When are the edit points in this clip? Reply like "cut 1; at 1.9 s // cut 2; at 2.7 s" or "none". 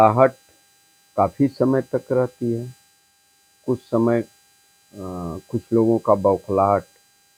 none